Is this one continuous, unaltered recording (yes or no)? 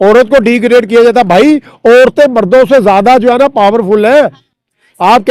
yes